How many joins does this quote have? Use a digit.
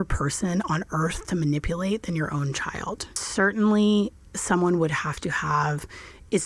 1